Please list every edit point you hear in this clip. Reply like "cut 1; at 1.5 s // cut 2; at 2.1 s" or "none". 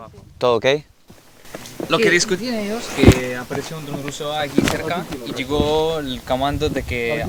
none